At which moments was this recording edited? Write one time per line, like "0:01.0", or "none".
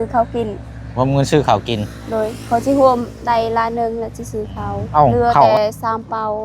0:05.3